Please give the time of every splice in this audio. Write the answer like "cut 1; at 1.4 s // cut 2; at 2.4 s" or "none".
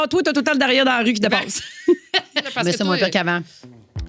cut 1; at 2.5 s